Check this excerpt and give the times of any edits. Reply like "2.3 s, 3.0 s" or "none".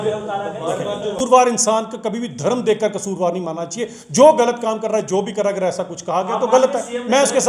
1.2 s